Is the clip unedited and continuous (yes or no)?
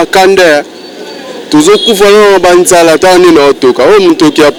yes